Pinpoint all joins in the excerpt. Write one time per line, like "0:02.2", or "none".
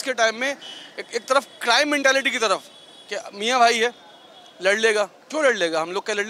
none